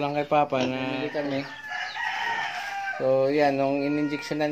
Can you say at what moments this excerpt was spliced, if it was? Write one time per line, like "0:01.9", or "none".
0:01.0